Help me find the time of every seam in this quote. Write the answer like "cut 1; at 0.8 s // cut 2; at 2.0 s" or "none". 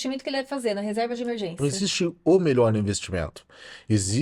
cut 1; at 1.6 s

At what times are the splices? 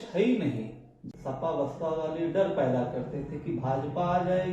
cut 1; at 0.9 s

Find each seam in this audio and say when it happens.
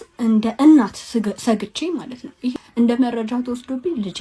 cut 1; at 2.5 s

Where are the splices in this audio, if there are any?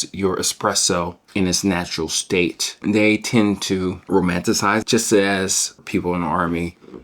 cut 1; at 1.2 s // cut 2; at 2.7 s // cut 3; at 4.0 s // cut 4; at 4.8 s // cut 5; at 5.9 s

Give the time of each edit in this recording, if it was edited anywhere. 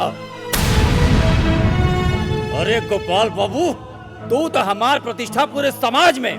none

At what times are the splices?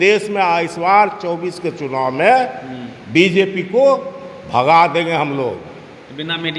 none

